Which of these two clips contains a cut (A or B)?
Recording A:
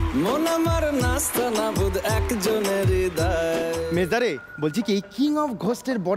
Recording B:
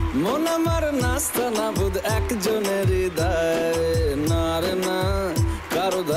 A